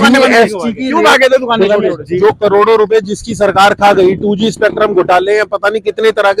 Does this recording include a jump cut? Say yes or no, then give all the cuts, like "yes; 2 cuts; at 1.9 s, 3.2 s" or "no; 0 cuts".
yes; 1 cut; at 2.1 s